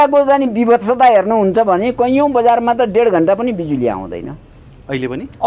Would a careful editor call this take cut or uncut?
uncut